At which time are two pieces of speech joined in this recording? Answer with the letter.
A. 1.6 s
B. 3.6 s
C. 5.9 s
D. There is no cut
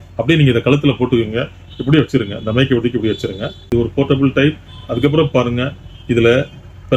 B